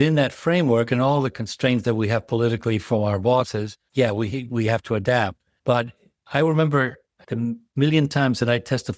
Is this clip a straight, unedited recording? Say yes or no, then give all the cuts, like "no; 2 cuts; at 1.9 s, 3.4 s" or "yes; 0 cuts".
yes; 0 cuts